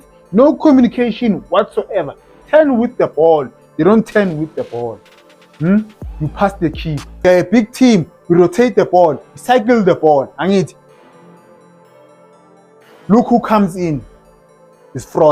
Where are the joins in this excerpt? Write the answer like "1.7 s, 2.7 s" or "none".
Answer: 7.3 s